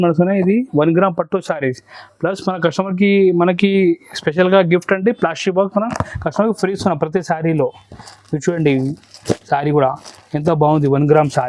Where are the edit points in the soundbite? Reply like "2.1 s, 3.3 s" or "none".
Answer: none